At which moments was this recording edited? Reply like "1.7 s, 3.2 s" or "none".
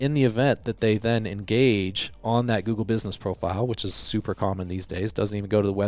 none